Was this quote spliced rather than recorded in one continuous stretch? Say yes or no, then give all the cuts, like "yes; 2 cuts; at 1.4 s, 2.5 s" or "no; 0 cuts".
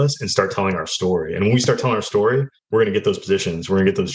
yes; 1 cut; at 2.6 s